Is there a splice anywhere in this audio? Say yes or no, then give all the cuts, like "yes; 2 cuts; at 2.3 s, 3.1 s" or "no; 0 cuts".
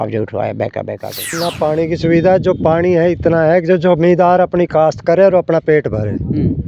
yes; 1 cut; at 1.4 s